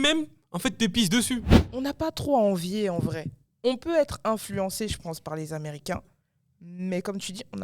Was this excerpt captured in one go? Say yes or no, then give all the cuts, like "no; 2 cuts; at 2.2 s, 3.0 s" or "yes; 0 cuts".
no; 1 cut; at 1.6 s